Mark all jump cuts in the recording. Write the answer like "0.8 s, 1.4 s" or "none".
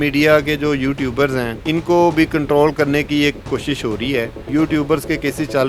1.5 s, 4.4 s